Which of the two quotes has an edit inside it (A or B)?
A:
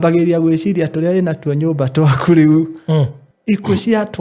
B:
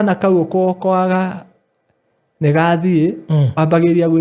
A